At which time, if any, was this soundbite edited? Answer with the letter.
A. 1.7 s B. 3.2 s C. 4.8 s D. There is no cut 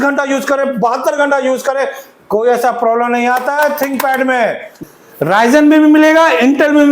C